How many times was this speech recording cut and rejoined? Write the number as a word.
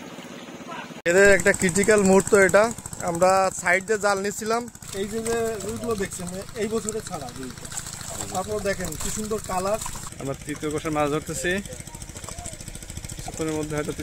three